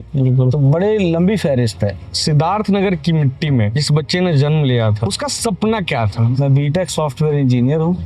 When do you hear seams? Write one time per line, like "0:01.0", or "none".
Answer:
0:02.0
0:03.8
0:05.0
0:06.3